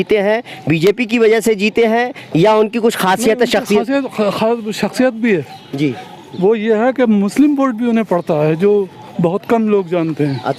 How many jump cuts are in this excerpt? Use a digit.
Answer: 0